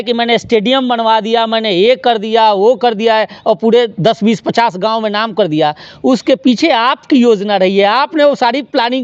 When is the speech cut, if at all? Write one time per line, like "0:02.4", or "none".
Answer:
none